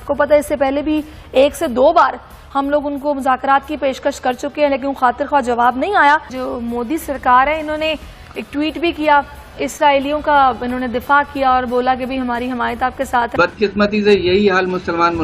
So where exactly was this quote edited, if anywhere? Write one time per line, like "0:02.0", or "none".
0:06.4
0:13.3